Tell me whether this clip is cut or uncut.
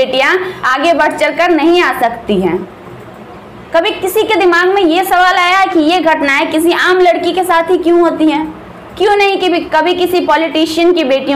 uncut